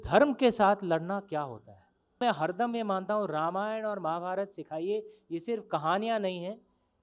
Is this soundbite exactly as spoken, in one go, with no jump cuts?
no; 1 cut; at 2.2 s

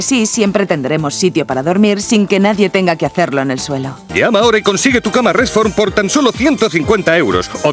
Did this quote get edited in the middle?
yes; 1 cut; at 3.9 s

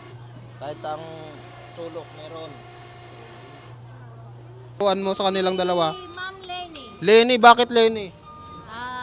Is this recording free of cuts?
no; 1 cut; at 4.8 s

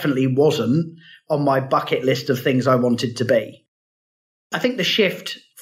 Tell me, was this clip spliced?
yes; 1 cut; at 4.1 s

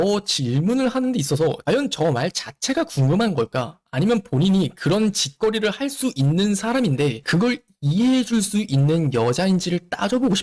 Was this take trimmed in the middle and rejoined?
no; 0 cuts

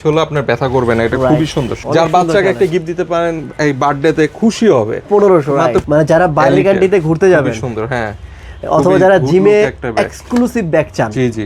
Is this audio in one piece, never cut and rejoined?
no; 2 cuts; at 1.7 s, 5.8 s

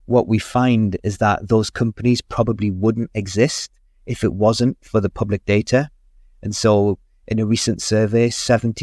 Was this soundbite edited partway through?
no; 0 cuts

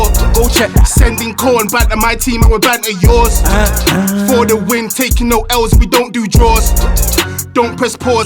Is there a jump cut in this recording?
no; 0 cuts

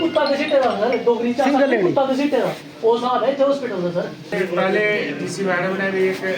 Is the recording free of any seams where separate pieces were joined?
no; 1 cut; at 4.3 s

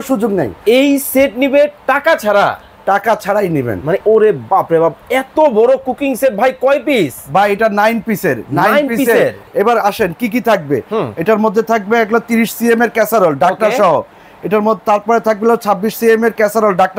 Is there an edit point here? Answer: yes; 2 cuts; at 4.0 s, 9.4 s

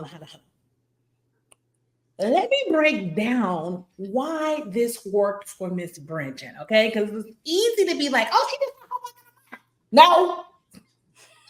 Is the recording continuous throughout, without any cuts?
yes; 0 cuts

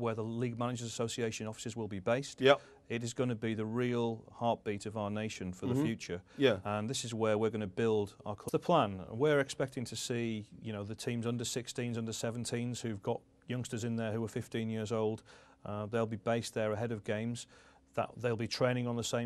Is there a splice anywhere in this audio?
no; 0 cuts

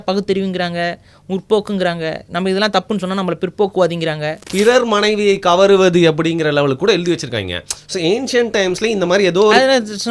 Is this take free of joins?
no; 1 cut; at 4.4 s

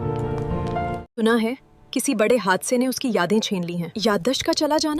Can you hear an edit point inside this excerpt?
yes; 1 cut; at 1.1 s

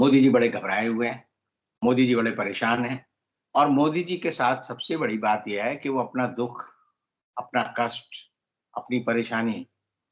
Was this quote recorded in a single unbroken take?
yes; 0 cuts

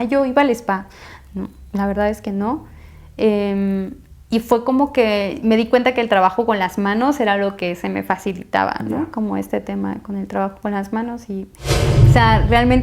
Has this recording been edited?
yes; 1 cut; at 11.9 s

